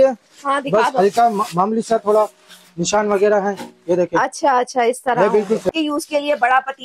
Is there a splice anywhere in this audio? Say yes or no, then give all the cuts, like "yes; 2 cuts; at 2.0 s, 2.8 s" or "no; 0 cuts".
yes; 1 cut; at 5.7 s